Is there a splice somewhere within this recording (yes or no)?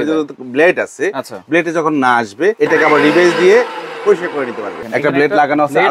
yes